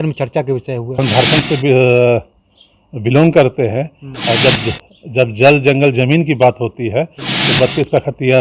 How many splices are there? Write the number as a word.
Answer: one